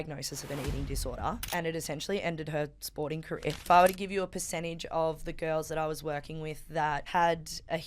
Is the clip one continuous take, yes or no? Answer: no